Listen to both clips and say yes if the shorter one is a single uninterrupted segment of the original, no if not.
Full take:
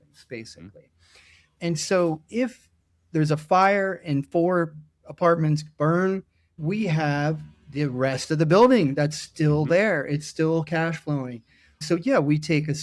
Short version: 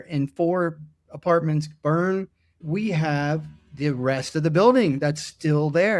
yes